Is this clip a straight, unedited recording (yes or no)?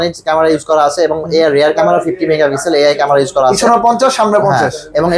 yes